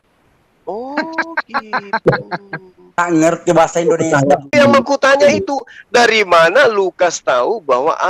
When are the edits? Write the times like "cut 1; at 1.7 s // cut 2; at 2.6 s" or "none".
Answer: cut 1; at 4.5 s